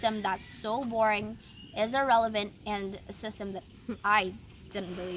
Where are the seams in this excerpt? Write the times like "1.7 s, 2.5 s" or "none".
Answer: none